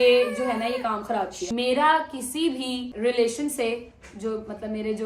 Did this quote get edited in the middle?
yes; 2 cuts; at 1.4 s, 2.9 s

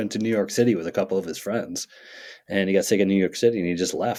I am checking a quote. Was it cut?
no; 0 cuts

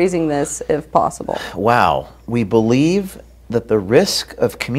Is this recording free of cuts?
yes; 0 cuts

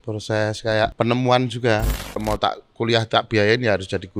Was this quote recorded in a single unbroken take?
no; 2 cuts; at 0.9 s, 2.2 s

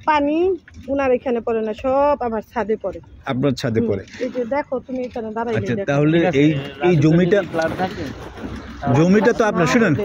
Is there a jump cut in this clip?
no; 0 cuts

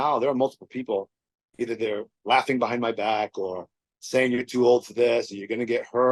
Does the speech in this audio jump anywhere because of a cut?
no; 0 cuts

